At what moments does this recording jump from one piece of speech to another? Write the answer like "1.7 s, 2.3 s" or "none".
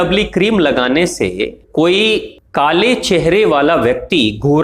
1.6 s, 2.4 s